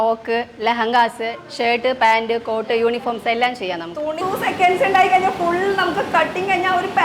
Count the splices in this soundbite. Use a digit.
1